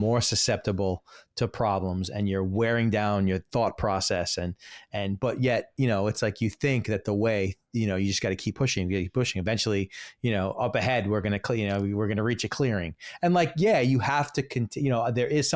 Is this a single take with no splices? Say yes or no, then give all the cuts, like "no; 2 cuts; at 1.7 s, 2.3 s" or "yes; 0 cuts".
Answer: yes; 0 cuts